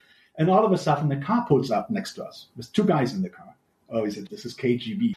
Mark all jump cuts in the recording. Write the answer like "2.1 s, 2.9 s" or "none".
4.0 s

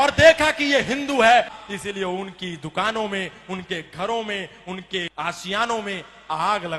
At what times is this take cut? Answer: 1.6 s, 5.1 s

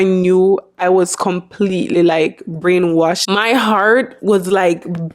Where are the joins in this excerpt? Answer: 3.2 s

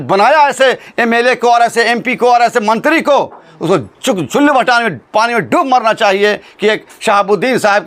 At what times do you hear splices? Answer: none

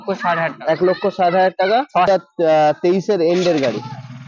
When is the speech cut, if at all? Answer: 2.1 s

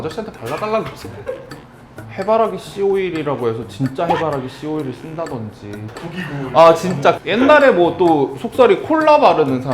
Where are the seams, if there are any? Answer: 2.0 s, 5.9 s, 7.2 s

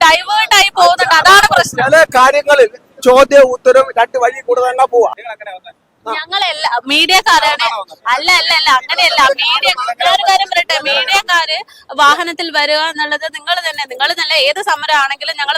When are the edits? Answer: 5.2 s

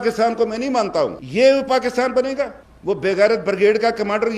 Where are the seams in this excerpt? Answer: 1.2 s, 2.7 s

